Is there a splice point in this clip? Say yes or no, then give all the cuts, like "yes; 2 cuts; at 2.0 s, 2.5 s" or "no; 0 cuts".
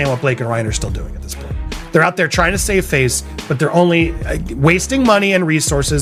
no; 0 cuts